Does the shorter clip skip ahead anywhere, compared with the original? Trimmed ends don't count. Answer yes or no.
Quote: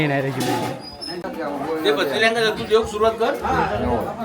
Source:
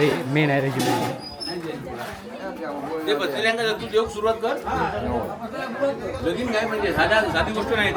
yes